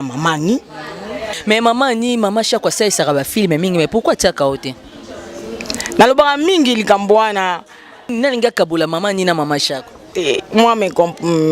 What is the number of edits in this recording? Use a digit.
2